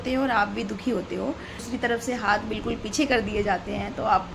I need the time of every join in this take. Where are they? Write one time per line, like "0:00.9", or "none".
0:01.6